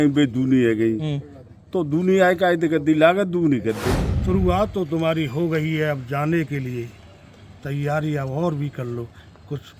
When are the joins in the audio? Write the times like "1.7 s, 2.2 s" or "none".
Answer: 4.0 s